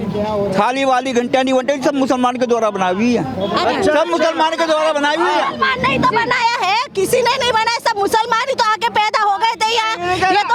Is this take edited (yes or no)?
no